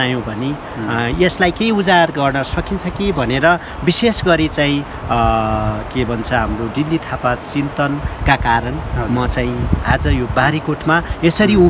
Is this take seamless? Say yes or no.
yes